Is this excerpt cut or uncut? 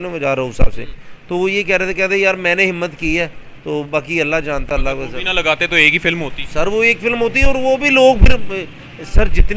uncut